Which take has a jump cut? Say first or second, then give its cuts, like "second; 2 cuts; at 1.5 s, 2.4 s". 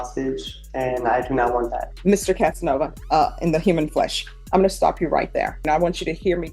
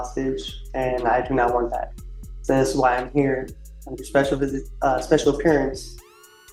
first; 3 cuts; at 1.9 s, 3.0 s, 5.6 s